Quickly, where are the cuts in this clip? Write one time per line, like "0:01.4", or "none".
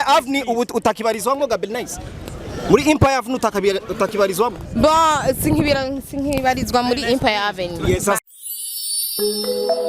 0:08.2